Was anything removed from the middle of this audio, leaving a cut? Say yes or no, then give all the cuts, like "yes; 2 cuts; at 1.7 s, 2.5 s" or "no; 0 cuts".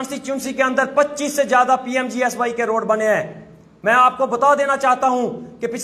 no; 0 cuts